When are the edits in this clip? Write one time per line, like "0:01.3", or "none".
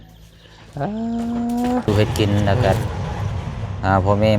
0:01.9